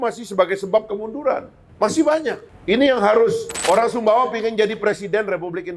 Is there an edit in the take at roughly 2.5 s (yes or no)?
yes